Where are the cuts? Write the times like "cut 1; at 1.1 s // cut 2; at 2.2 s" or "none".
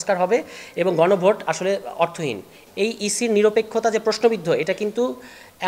cut 1; at 2.6 s